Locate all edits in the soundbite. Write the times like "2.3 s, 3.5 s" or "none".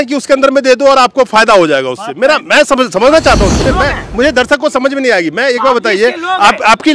3.7 s